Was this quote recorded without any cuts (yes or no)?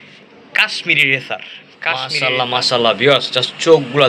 no